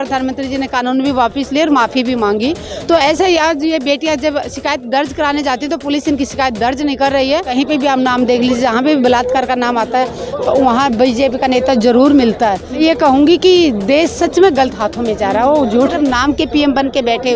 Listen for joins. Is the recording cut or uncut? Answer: cut